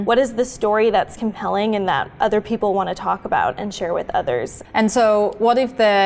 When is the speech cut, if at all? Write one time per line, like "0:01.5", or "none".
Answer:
0:04.6